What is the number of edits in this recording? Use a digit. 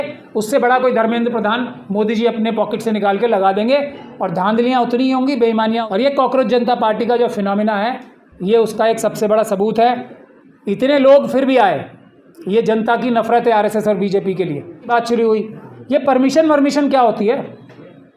2